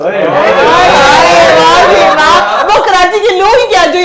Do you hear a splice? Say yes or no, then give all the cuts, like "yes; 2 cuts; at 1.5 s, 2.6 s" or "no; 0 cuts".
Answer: no; 0 cuts